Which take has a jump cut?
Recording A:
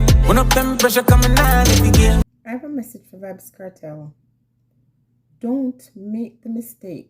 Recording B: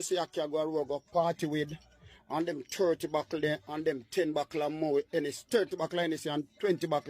A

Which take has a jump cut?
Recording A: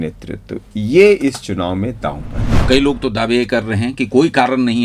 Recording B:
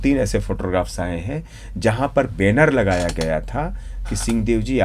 A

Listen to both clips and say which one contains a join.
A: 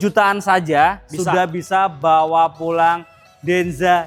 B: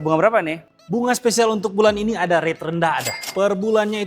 B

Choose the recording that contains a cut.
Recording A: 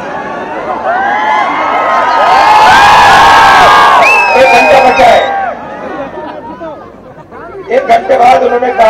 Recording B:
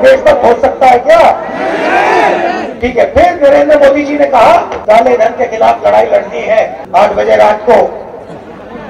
B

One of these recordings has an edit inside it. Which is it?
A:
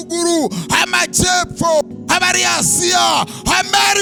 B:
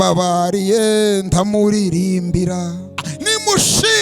B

